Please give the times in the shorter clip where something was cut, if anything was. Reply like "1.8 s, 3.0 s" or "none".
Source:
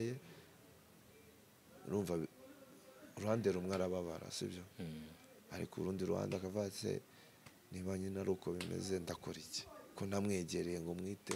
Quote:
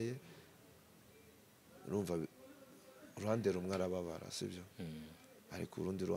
none